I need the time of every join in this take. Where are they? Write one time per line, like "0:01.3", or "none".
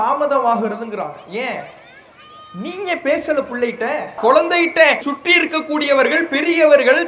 0:04.2
0:05.0